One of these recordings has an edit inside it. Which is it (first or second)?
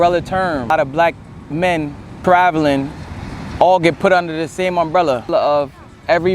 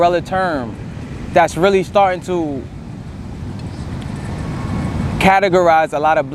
first